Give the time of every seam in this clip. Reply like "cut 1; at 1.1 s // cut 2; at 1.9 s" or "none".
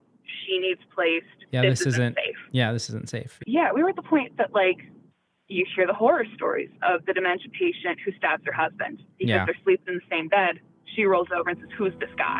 cut 1; at 3.3 s

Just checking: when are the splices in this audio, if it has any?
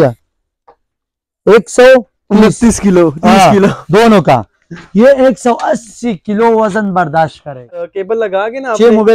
cut 1; at 7.8 s

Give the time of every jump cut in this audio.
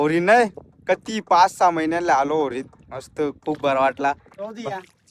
none

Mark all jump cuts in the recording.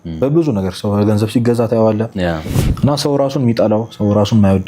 cut 1; at 2.6 s

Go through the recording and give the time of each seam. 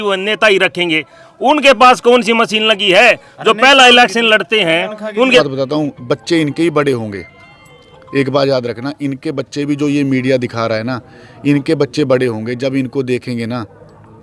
cut 1; at 5.4 s

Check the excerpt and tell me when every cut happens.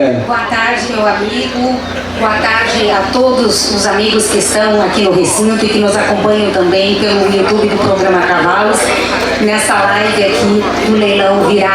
none

